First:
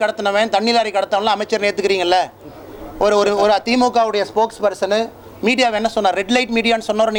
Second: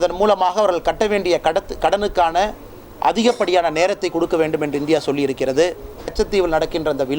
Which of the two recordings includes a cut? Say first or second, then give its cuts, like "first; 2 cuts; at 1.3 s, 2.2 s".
second; 1 cut; at 6.1 s